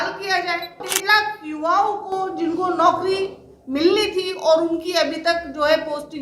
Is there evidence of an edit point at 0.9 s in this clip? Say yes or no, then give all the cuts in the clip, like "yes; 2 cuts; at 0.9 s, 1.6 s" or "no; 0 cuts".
yes; 1 cut; at 0.9 s